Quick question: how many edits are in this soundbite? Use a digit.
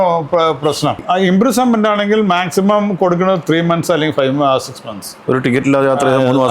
1